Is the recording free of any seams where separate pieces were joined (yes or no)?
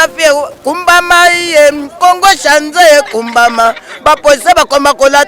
yes